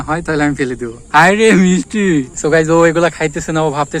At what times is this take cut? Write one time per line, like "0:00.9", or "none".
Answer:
0:00.9
0:02.3